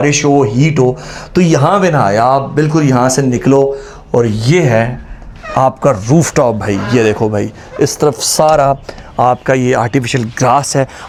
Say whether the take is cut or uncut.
uncut